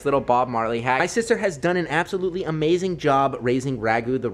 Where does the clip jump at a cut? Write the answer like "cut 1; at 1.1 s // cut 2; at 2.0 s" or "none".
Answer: cut 1; at 1.0 s